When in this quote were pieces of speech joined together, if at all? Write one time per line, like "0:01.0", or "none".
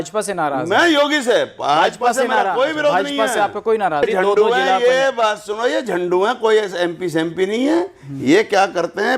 0:04.0